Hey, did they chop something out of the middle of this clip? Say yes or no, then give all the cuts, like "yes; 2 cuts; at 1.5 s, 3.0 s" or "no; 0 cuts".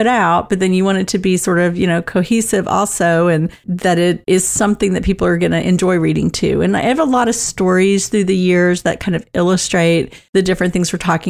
yes; 1 cut; at 10.2 s